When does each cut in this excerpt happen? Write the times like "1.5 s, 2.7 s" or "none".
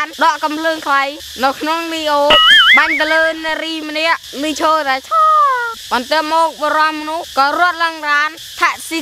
5.7 s